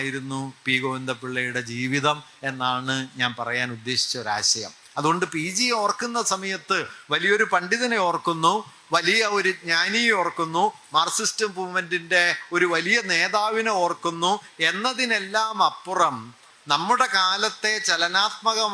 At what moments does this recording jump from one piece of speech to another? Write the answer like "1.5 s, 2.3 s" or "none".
none